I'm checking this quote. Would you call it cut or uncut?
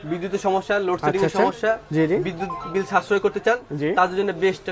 uncut